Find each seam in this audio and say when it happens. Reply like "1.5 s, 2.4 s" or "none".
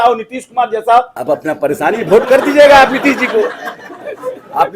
1.2 s